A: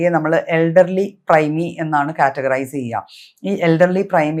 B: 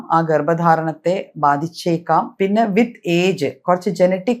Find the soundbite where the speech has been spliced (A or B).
B